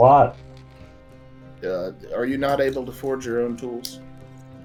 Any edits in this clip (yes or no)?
no